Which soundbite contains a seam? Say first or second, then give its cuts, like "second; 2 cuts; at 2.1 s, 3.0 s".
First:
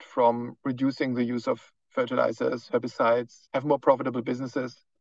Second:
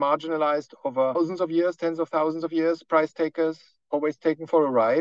first; 1 cut; at 3.4 s